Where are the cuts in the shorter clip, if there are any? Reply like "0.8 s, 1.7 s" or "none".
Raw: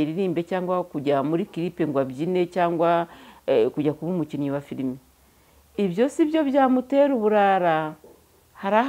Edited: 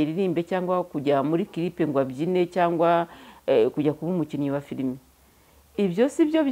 none